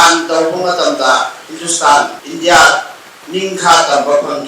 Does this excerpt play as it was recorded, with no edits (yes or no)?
no